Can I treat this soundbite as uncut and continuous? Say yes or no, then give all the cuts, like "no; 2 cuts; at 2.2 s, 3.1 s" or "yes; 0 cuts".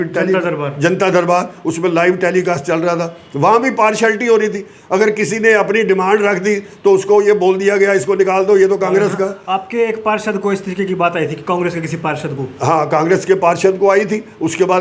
yes; 0 cuts